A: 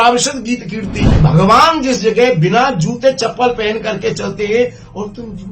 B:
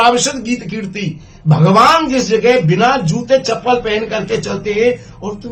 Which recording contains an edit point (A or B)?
A